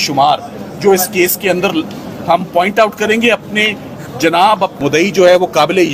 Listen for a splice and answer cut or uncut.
cut